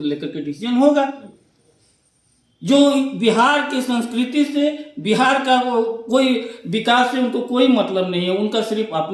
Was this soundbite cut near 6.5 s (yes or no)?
no